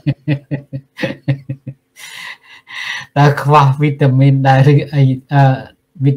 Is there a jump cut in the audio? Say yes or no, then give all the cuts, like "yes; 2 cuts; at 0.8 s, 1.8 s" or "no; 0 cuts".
no; 0 cuts